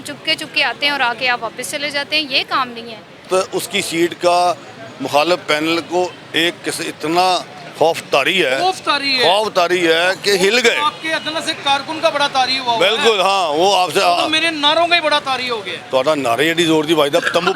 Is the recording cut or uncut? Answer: cut